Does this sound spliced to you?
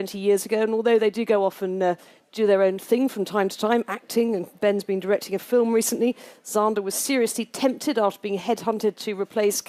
no; 0 cuts

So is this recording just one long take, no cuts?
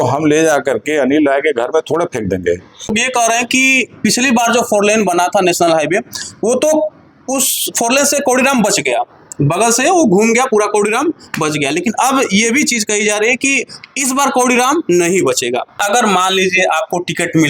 no; 2 cuts; at 2.9 s, 15.8 s

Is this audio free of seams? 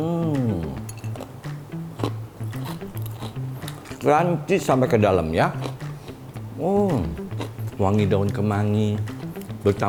yes; 0 cuts

